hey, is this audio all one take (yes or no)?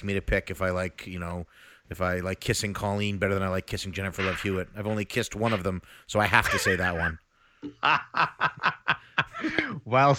yes